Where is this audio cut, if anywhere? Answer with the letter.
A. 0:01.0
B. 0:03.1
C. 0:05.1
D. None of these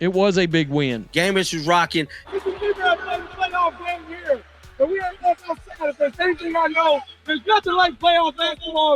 A